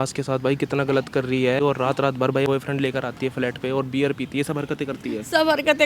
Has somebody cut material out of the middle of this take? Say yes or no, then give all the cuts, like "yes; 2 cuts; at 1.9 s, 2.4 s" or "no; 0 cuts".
yes; 1 cut; at 1.6 s